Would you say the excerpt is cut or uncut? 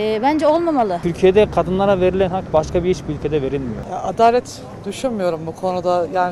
cut